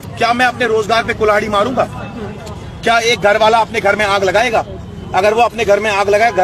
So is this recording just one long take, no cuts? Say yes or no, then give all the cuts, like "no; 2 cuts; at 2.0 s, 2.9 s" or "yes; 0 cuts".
yes; 0 cuts